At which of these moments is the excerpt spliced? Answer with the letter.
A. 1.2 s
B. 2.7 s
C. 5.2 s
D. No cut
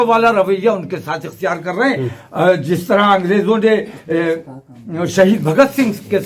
D